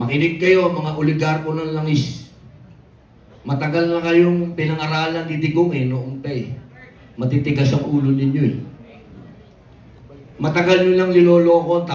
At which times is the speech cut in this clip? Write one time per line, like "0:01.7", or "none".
none